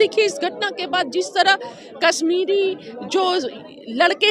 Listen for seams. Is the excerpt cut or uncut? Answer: uncut